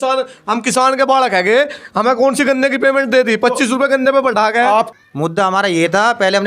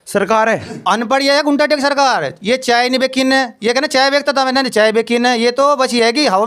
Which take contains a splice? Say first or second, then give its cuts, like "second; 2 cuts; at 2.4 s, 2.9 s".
first; 1 cut; at 4.9 s